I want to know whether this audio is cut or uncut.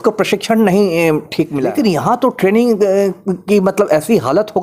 cut